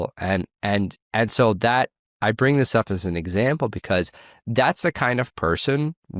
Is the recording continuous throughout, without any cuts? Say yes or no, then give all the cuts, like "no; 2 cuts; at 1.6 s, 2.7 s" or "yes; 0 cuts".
yes; 0 cuts